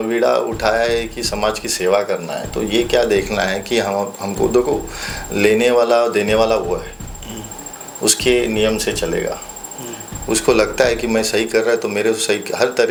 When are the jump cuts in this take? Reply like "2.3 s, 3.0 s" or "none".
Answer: none